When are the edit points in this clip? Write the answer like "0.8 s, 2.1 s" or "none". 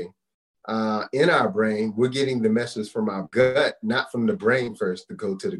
3.3 s